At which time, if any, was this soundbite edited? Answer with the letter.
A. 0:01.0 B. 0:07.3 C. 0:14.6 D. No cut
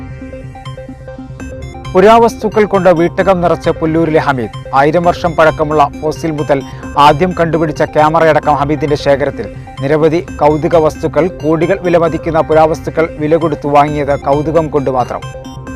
A